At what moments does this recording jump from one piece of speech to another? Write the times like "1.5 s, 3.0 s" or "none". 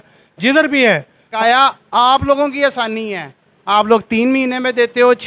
1.2 s